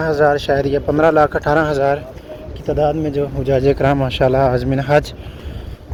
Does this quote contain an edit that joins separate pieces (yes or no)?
no